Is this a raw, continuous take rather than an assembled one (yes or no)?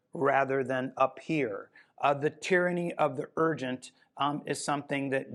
yes